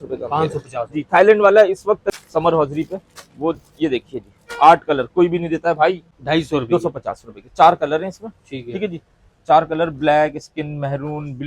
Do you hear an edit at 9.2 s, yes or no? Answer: no